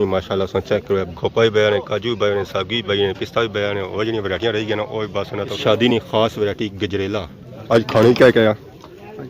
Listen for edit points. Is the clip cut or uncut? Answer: cut